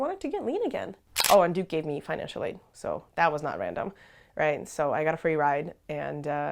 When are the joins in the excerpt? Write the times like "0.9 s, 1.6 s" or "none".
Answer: 1.2 s